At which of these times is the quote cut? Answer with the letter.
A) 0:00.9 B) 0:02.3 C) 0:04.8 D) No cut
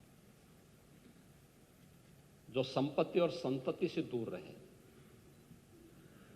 D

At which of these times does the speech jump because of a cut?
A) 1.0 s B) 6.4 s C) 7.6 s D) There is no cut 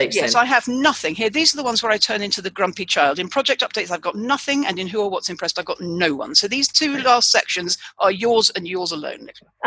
D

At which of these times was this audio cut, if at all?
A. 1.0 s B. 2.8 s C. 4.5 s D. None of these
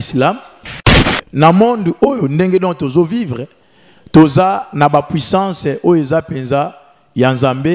A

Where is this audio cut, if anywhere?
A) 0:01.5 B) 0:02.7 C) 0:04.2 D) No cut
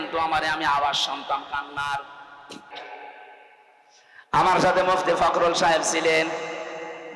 B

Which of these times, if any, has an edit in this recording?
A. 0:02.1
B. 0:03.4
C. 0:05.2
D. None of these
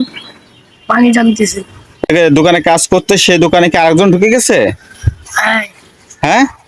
A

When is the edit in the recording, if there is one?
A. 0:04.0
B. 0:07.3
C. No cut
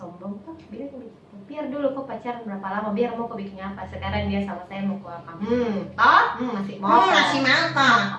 C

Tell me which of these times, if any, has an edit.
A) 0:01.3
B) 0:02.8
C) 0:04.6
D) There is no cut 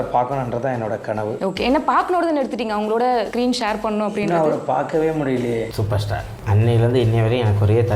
D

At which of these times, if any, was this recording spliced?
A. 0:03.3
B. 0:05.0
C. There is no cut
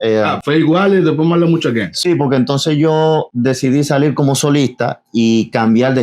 A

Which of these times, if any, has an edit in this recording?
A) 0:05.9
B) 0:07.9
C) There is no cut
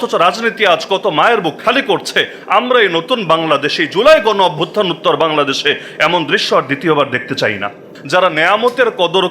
B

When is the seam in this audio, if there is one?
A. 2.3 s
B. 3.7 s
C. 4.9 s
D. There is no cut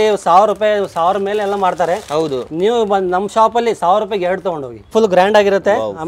C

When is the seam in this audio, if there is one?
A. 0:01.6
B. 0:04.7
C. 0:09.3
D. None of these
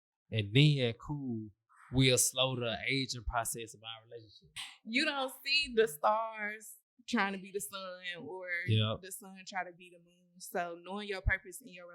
B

